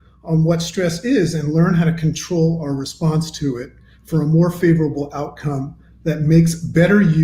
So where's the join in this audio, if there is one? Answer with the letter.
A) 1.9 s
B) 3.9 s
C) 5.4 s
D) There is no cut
D